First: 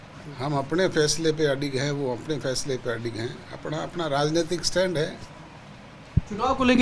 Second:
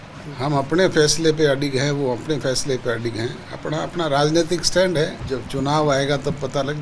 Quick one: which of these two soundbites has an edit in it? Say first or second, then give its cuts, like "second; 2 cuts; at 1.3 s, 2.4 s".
second; 1 cut; at 5.2 s